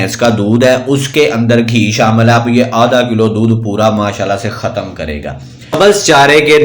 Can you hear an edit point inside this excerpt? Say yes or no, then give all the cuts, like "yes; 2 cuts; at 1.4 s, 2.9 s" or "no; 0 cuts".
yes; 1 cut; at 5.8 s